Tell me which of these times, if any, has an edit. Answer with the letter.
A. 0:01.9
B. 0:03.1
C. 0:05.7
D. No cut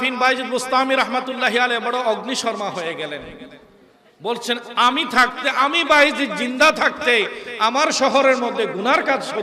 D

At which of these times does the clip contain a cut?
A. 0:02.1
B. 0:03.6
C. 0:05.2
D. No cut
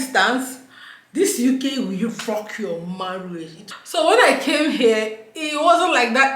B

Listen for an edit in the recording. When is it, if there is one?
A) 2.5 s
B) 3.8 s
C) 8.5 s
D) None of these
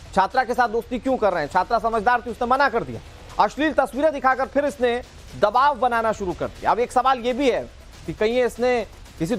D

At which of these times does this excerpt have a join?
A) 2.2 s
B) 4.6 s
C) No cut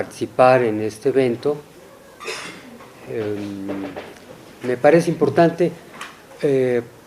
A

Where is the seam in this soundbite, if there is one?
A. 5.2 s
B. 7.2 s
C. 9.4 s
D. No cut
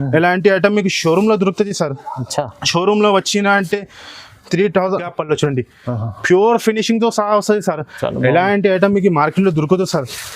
A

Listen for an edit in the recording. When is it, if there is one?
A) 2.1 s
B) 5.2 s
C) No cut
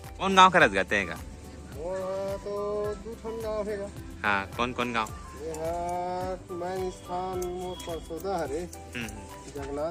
C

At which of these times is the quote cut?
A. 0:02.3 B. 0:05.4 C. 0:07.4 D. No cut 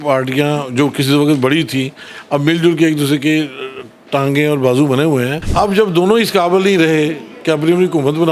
B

